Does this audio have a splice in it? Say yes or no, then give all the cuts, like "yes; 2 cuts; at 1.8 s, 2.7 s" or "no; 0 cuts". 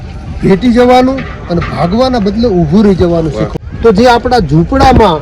yes; 1 cut; at 3.5 s